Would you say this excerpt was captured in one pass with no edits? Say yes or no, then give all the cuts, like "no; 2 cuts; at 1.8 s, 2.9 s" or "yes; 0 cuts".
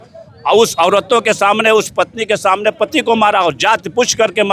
yes; 0 cuts